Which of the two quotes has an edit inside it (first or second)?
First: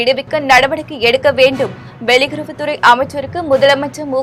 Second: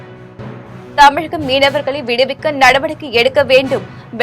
second